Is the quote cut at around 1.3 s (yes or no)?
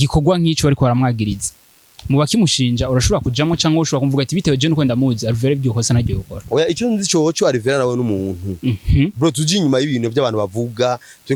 no